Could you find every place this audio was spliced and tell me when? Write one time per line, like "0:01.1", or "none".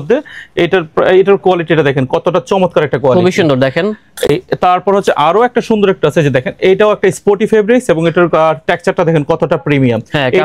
none